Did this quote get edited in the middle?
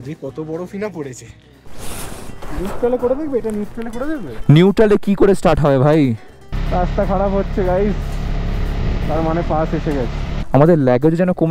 yes; 3 cuts; at 1.7 s, 6.6 s, 10.4 s

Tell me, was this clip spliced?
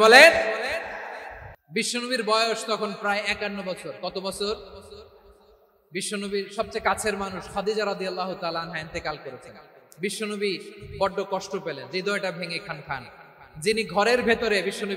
yes; 1 cut; at 1.6 s

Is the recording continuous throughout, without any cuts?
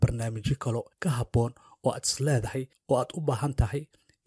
no; 2 cuts; at 0.9 s, 2.7 s

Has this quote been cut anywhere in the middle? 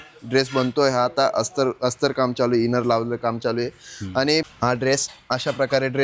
yes; 1 cut; at 4.5 s

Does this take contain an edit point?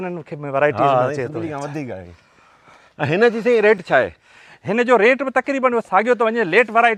no; 0 cuts

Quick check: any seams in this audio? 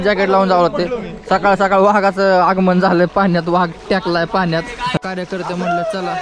yes; 1 cut; at 5.0 s

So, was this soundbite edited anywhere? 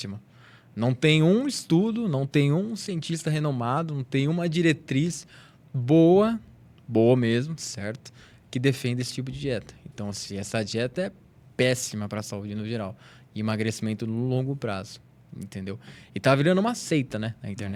no; 0 cuts

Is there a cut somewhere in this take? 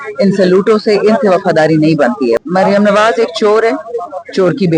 yes; 1 cut; at 2.4 s

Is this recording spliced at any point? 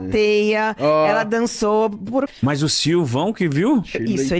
yes; 1 cut; at 2.3 s

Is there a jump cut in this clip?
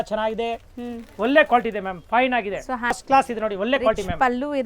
yes; 1 cut; at 2.9 s

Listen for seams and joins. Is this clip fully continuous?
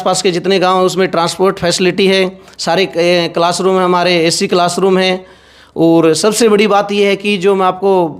yes; 0 cuts

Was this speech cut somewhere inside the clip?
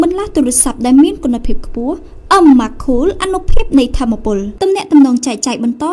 no; 0 cuts

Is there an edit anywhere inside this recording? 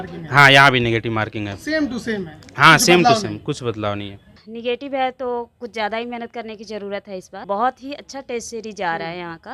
yes; 2 cuts; at 4.4 s, 7.4 s

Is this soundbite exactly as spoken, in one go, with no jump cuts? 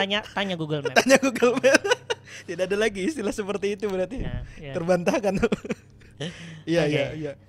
yes; 0 cuts

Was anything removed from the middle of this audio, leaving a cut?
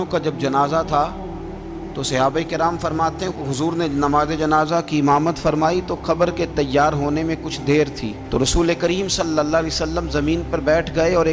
no; 0 cuts

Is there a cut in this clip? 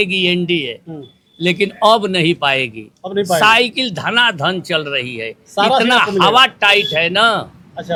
no; 0 cuts

